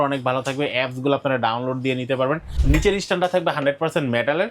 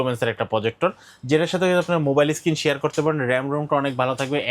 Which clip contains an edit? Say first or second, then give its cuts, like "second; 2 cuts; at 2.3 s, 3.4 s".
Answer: first; 1 cut; at 2.5 s